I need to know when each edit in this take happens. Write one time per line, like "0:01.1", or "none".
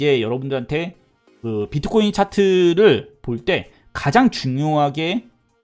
none

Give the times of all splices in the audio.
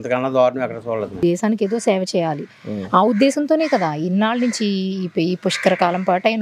0:01.2

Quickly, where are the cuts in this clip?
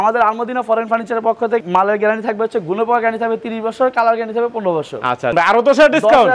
0:01.7
0:05.3

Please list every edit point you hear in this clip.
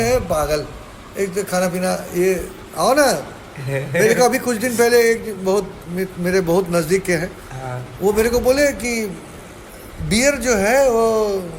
none

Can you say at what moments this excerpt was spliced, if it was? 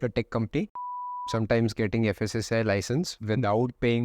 0:01.3

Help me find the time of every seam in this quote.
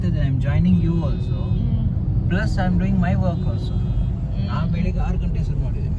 none

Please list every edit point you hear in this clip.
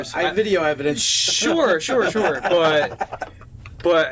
0:03.2

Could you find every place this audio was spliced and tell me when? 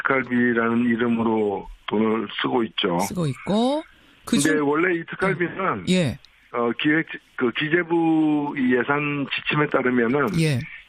0:05.8

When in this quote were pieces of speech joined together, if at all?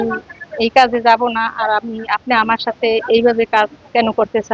none

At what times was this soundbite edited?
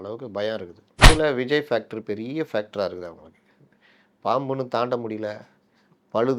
0:01.1

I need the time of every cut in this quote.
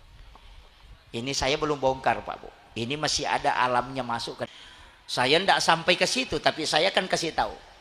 0:04.5

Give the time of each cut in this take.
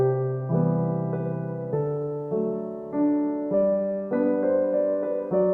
0:04.4

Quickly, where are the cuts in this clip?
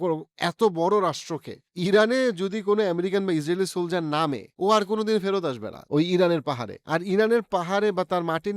0:01.6

